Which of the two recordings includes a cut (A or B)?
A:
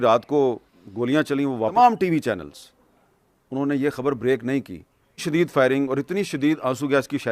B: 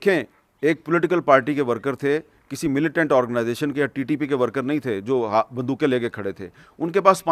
A